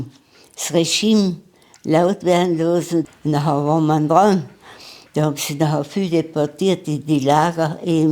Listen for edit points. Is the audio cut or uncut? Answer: cut